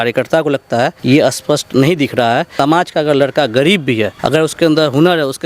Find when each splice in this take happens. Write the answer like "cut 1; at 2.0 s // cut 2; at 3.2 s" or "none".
cut 1; at 1.0 s // cut 2; at 2.5 s // cut 3; at 4.2 s